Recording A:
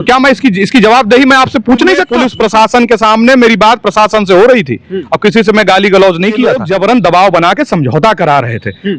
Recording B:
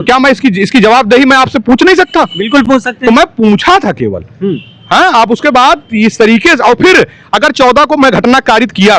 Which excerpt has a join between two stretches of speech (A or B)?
A